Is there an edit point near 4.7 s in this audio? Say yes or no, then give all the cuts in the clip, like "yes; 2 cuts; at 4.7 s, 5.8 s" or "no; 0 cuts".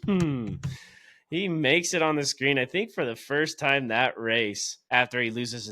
yes; 1 cut; at 4.7 s